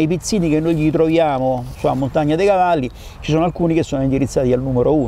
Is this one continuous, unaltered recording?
yes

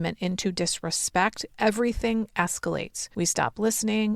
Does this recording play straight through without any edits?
no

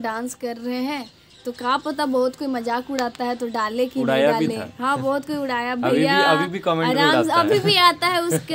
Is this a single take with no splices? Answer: yes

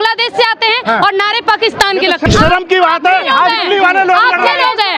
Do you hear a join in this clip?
yes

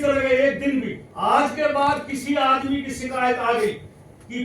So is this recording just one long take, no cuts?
no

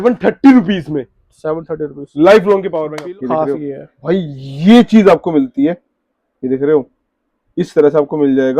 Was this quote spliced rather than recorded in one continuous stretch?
yes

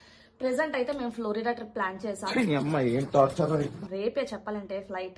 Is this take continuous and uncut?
yes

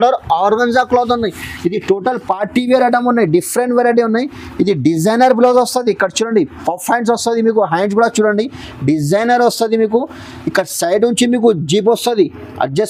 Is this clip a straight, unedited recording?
yes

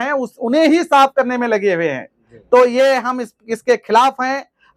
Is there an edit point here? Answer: no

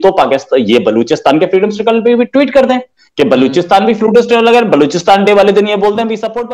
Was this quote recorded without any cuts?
yes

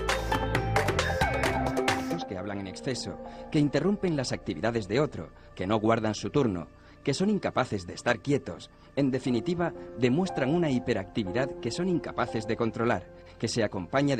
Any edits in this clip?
no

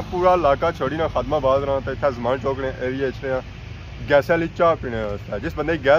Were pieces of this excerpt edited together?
no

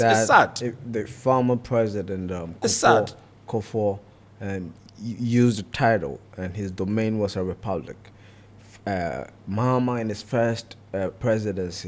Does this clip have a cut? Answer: no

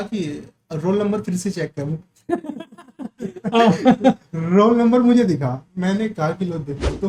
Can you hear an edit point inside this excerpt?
no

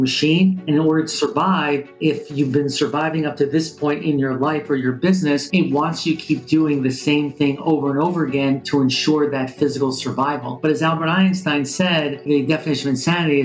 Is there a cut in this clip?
yes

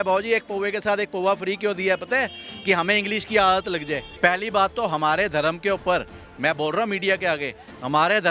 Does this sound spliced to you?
yes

